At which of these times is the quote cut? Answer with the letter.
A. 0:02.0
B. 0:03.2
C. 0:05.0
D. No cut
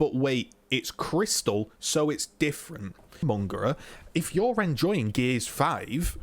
B